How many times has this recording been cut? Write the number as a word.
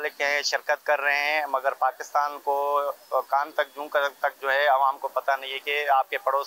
zero